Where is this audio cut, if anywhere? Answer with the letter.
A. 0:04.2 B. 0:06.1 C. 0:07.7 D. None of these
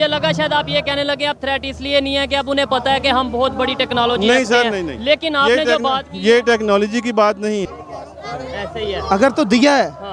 C